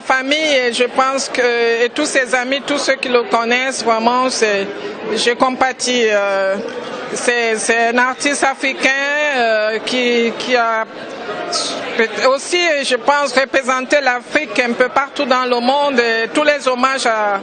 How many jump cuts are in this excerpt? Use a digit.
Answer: 0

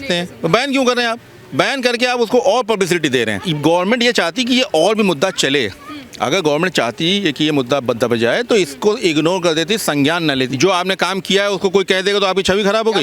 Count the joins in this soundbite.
2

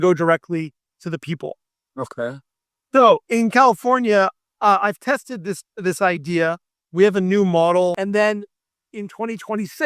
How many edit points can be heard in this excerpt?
1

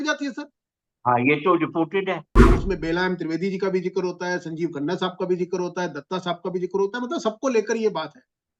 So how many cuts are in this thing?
1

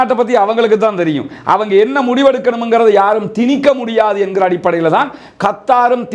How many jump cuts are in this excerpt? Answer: 0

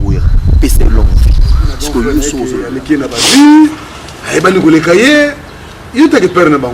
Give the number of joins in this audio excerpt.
1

